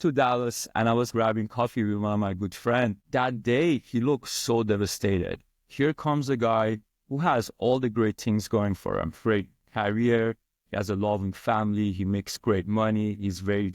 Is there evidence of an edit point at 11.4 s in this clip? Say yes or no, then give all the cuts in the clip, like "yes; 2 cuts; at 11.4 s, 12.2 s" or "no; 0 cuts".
no; 1 cut; at 1.1 s